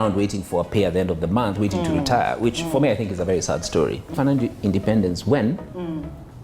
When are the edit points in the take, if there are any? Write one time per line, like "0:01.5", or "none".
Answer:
0:04.1